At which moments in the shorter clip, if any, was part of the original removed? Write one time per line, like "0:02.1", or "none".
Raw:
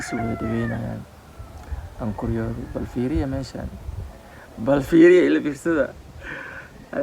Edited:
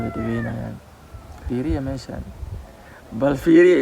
0:01.4